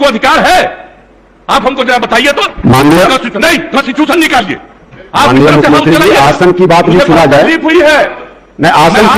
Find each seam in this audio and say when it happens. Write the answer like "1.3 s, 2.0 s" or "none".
none